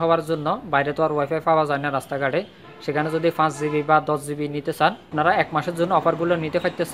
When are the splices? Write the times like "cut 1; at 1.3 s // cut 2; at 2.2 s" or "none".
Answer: cut 1; at 5.1 s